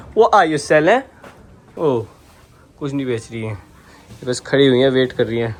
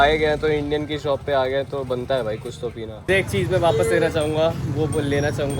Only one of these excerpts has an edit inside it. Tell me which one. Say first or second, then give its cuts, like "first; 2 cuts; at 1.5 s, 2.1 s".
second; 1 cut; at 2.9 s